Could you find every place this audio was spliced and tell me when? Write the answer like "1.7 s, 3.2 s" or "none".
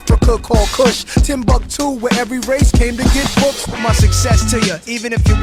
none